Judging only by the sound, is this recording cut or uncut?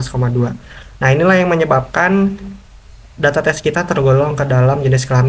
uncut